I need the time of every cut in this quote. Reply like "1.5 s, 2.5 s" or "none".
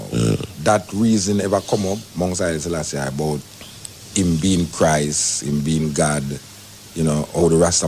none